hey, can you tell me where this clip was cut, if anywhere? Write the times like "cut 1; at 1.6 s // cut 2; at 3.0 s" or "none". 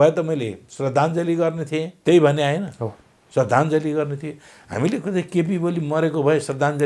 cut 1; at 1.9 s